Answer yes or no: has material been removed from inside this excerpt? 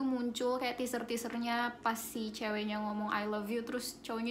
no